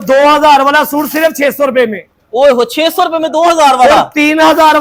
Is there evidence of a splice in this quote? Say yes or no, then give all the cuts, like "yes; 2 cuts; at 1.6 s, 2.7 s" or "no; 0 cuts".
no; 0 cuts